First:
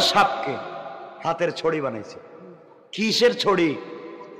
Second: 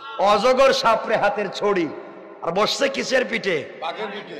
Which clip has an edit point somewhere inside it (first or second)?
first